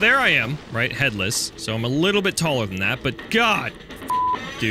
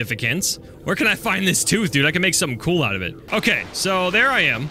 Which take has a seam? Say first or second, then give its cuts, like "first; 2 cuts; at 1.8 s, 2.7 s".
second; 1 cut; at 3.1 s